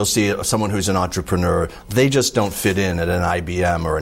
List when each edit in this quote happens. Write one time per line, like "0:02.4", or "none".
none